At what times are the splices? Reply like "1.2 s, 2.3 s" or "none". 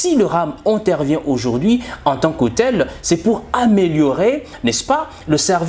none